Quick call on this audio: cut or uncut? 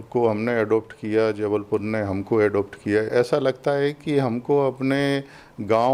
cut